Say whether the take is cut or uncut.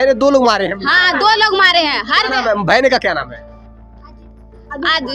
uncut